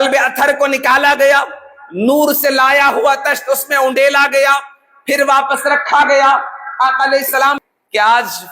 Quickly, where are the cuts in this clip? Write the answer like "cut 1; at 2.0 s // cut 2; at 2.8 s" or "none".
cut 1; at 7.6 s

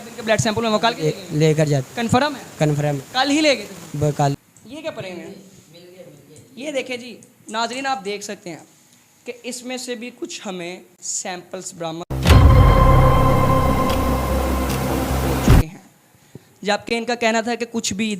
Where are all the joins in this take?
cut 1; at 4.4 s

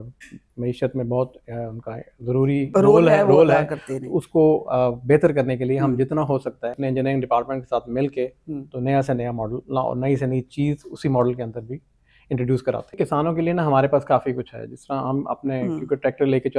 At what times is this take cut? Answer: cut 1; at 6.8 s // cut 2; at 13.0 s

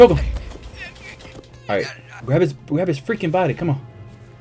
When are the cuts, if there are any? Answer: cut 1; at 1.5 s

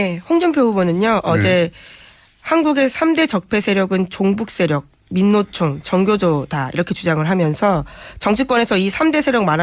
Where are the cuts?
cut 1; at 2.8 s

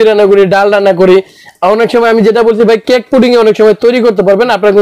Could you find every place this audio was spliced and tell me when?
none

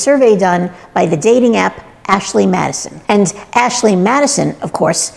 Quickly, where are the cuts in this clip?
cut 1; at 2.3 s

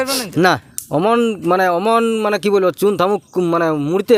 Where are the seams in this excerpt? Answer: none

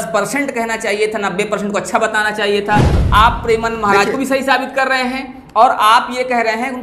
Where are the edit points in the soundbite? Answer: cut 1; at 2.9 s

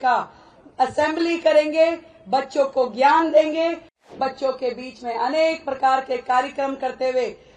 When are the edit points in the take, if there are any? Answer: cut 1; at 4.1 s

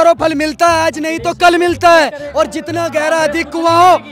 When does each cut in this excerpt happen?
none

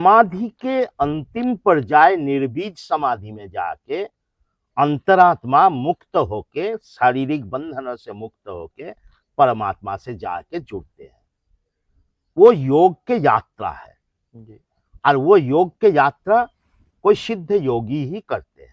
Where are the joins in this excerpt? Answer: none

